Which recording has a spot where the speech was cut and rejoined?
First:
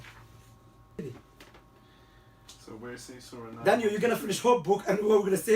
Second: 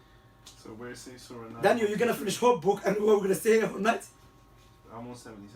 first; 1 cut; at 1.0 s

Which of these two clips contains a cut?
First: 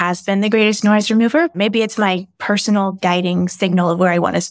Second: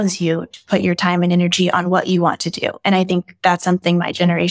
first; 1 cut; at 1.5 s

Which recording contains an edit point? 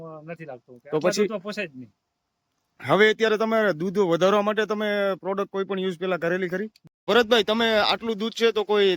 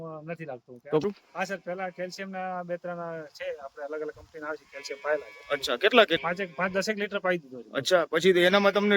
second; 2 cuts; at 1.0 s, 6.2 s

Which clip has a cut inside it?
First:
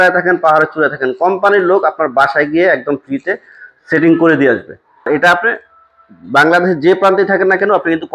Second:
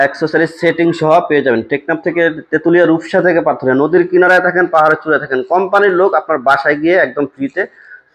first; 1 cut; at 5.1 s

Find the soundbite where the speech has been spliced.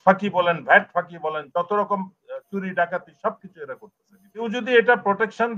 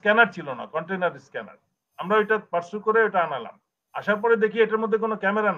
first; 1 cut; at 4.4 s

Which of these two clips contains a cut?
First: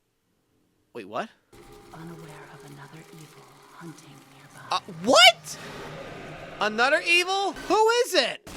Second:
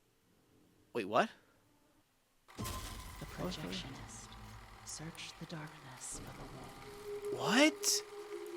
first; 2 cuts; at 1.6 s, 7.6 s

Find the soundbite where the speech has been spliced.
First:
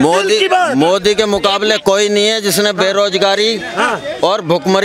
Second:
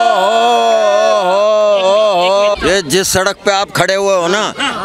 second; 1 cut; at 2.6 s

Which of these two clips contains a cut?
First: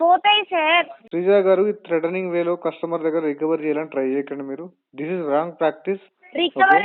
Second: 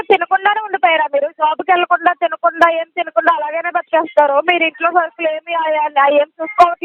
first; 1 cut; at 1.0 s

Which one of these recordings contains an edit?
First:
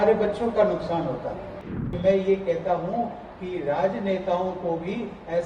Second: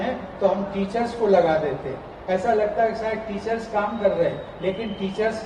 first; 1 cut; at 1.5 s

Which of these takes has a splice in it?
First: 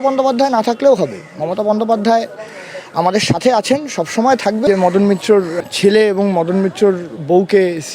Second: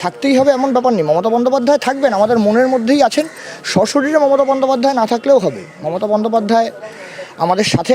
first; 2 cuts; at 4.7 s, 5.5 s

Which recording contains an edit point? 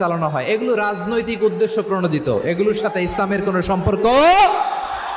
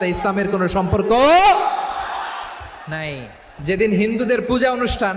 second; 1 cut; at 3.7 s

